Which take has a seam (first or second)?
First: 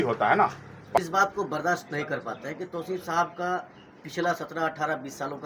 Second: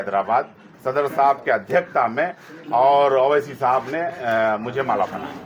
first